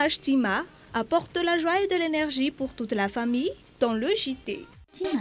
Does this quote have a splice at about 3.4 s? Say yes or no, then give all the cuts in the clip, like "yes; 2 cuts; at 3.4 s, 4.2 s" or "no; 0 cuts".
no; 0 cuts